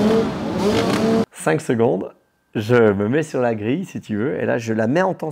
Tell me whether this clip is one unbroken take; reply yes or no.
no